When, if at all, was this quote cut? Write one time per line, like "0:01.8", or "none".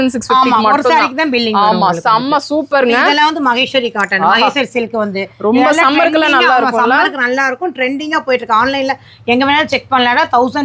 none

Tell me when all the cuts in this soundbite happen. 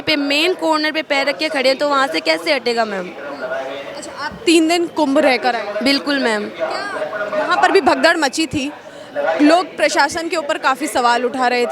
none

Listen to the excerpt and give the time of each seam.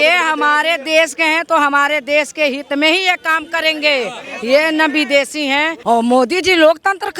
0:05.7

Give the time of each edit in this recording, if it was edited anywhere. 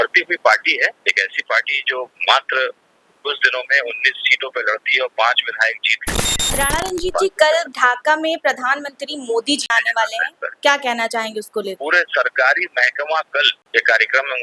0:06.6
0:09.6
0:11.8
0:13.6

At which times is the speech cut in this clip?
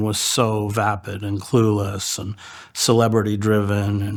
none

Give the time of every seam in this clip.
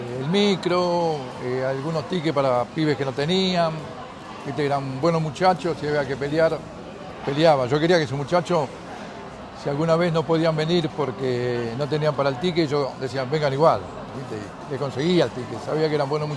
none

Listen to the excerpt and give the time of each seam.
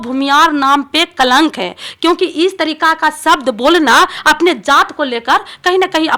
none

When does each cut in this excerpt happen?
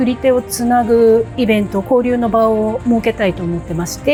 none

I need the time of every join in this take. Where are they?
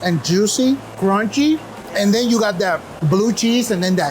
0:00.9
0:01.8
0:02.9

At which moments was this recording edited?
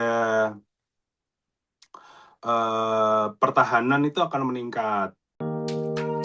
0:05.3

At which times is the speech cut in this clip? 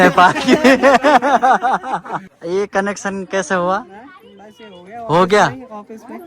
0:02.2

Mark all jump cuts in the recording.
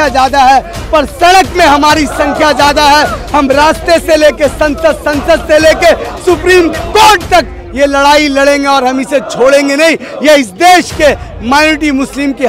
none

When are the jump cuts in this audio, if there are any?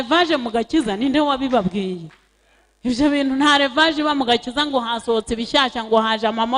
none

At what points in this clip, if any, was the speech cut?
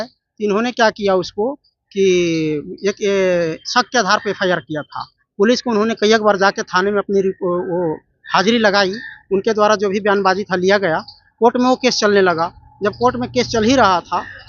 none

